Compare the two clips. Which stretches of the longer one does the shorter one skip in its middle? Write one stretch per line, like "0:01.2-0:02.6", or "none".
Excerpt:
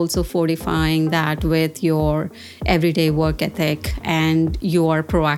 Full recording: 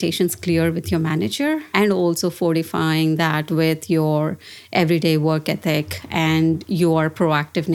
none